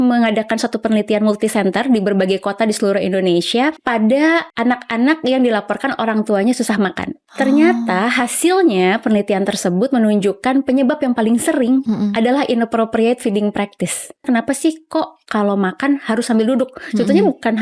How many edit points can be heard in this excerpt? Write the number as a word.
three